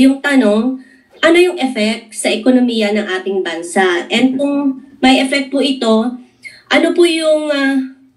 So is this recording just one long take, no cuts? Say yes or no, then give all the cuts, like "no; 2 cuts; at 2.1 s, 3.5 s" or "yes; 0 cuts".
yes; 0 cuts